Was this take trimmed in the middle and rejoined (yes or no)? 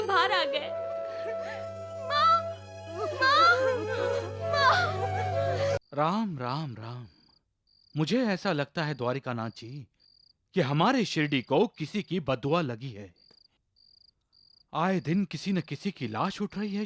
yes